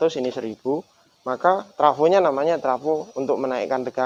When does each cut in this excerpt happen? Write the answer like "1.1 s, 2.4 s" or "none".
none